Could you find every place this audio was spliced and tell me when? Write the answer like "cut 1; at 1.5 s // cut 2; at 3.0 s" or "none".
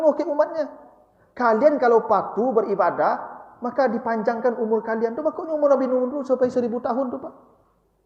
none